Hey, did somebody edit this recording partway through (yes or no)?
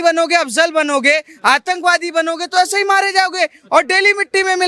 no